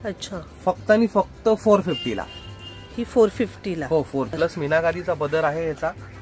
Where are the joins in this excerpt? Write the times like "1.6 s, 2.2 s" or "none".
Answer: 4.3 s